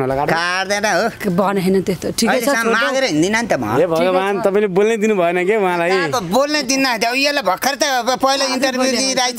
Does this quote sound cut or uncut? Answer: uncut